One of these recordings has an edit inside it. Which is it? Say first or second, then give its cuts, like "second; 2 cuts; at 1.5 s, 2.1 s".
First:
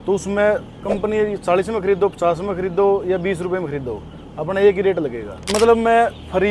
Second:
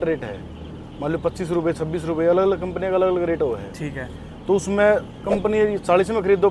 first; 1 cut; at 5.4 s